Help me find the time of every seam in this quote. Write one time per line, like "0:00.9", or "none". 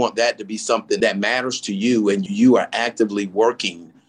0:01.0
0:02.2